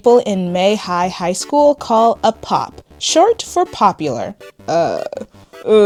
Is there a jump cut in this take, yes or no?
no